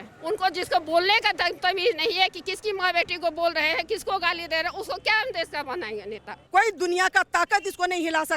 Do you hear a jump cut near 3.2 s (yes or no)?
no